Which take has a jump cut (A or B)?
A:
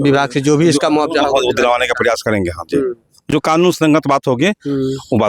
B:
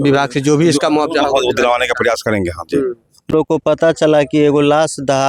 B